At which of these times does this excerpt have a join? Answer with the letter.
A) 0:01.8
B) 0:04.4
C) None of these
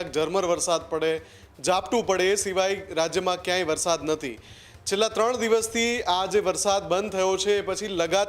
C